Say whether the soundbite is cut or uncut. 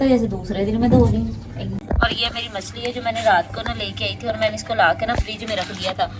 cut